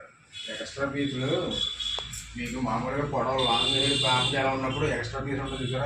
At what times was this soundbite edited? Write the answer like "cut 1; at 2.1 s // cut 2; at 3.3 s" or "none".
none

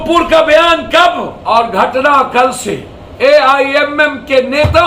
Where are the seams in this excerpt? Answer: cut 1; at 1.3 s // cut 2; at 3.0 s

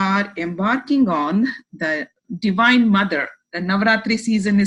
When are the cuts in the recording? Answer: none

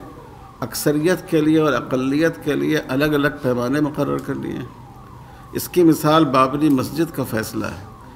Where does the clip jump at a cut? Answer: none

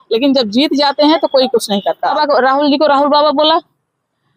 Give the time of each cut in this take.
cut 1; at 2.1 s

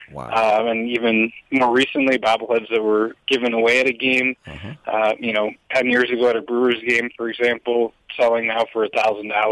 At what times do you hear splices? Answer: cut 1; at 8.0 s

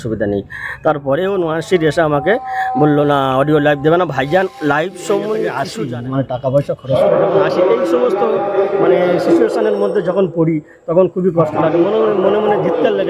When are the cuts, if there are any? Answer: cut 1; at 5.6 s

